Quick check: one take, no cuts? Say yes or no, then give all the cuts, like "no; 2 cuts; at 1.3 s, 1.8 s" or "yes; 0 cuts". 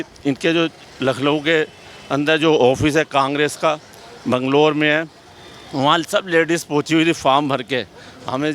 yes; 0 cuts